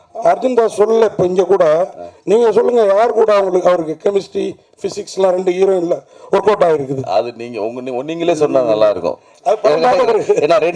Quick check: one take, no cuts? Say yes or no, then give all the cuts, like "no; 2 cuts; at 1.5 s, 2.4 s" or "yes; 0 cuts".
yes; 0 cuts